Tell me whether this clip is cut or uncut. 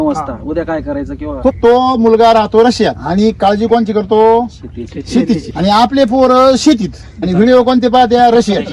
cut